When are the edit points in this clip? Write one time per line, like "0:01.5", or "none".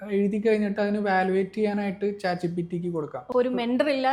0:03.2